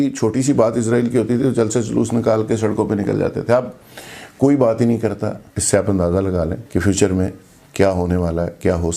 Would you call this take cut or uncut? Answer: cut